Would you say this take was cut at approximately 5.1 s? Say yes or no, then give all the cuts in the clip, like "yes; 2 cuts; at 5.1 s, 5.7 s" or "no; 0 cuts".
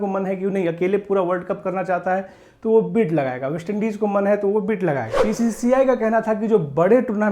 yes; 1 cut; at 5.1 s